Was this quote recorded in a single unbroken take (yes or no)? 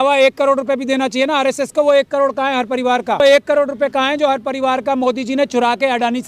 no